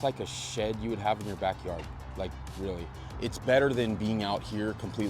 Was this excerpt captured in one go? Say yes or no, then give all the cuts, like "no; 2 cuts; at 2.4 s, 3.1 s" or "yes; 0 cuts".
no; 1 cut; at 3.0 s